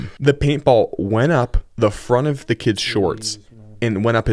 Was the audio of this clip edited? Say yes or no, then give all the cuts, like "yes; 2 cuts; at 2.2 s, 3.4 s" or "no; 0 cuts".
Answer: no; 0 cuts